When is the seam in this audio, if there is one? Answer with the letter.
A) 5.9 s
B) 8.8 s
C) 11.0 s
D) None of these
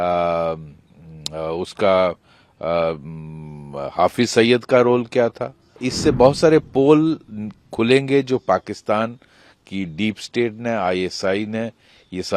A